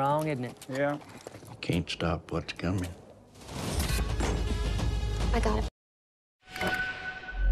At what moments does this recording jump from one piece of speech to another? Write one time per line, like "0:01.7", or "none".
0:05.6